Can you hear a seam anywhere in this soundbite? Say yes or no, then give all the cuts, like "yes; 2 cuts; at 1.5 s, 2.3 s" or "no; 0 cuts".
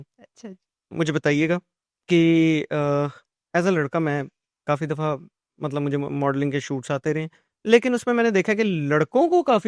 no; 0 cuts